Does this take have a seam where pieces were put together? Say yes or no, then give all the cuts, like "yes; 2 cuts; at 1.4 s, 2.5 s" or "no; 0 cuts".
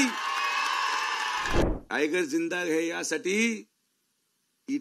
yes; 1 cut; at 1.7 s